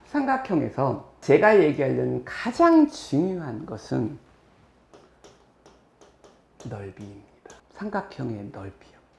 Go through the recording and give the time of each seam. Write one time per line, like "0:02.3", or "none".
0:01.1

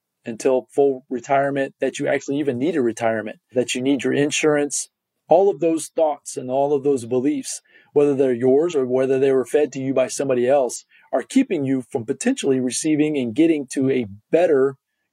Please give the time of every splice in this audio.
0:01.1
0:03.5

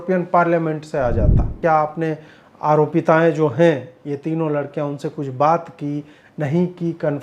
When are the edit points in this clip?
0:01.6

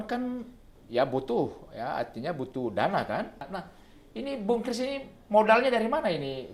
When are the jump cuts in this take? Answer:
0:03.4

